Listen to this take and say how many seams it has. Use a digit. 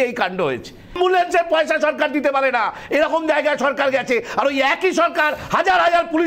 1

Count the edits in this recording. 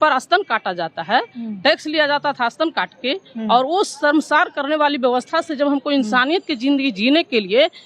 0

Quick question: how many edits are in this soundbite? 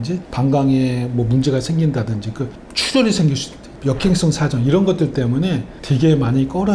0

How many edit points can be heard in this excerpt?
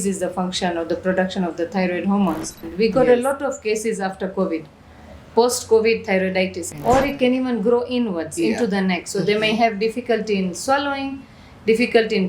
2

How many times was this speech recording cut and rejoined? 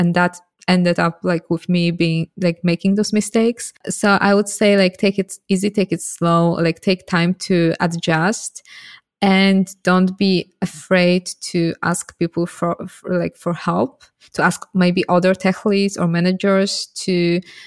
1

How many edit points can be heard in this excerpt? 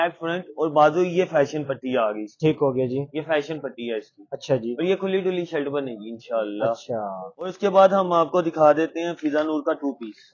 0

